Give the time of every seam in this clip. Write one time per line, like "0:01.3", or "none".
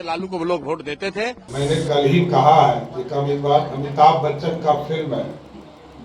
0:01.4